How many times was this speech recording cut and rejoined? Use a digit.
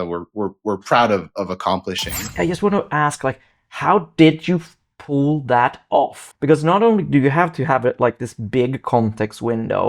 2